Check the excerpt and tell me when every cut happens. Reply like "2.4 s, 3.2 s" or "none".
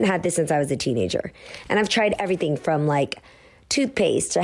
none